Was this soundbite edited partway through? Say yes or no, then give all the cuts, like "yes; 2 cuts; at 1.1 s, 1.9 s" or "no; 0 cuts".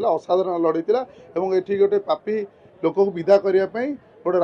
no; 0 cuts